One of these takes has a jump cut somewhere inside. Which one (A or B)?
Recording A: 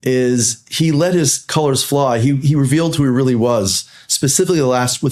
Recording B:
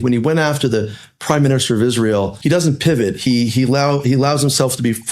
B